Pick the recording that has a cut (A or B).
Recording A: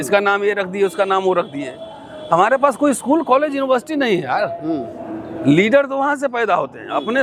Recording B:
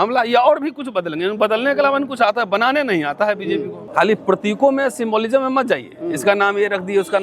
B